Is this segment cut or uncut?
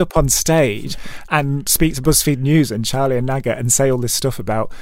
uncut